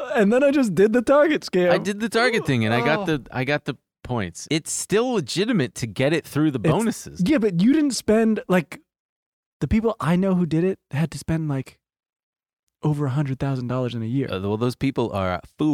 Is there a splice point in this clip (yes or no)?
yes